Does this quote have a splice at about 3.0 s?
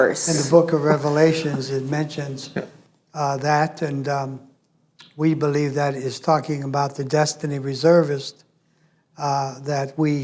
no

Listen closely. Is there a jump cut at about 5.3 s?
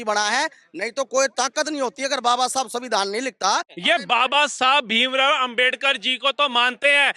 no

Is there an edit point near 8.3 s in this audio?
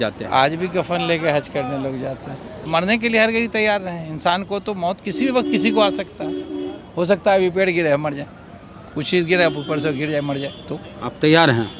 no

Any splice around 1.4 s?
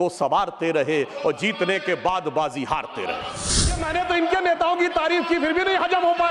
no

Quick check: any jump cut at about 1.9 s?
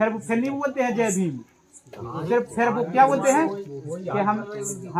no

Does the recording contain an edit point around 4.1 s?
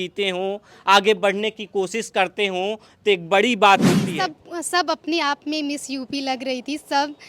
yes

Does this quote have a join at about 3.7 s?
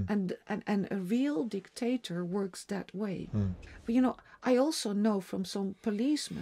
yes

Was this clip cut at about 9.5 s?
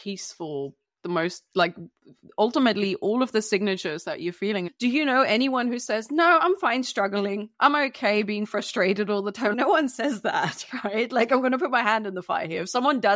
yes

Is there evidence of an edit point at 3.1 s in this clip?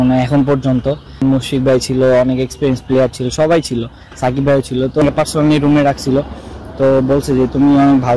no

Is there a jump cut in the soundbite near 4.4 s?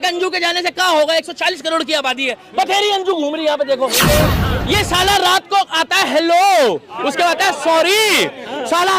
yes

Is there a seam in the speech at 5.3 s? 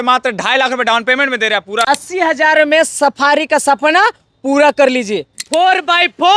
yes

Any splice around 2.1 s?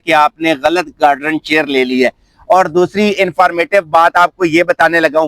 no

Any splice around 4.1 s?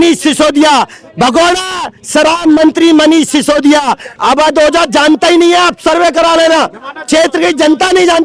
yes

